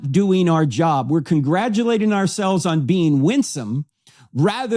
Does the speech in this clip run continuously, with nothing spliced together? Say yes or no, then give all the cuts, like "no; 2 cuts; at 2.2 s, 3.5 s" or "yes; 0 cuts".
yes; 0 cuts